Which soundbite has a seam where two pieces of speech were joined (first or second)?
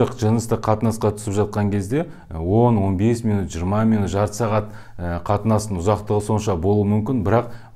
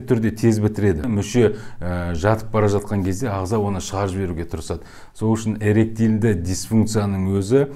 second